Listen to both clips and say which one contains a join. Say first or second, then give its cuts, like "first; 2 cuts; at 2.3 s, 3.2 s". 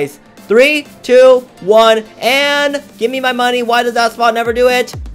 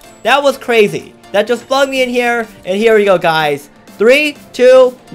second; 1 cut; at 2.5 s